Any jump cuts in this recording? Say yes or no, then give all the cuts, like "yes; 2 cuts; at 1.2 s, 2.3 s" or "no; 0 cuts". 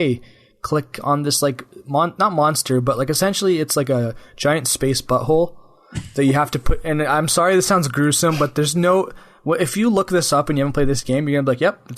no; 0 cuts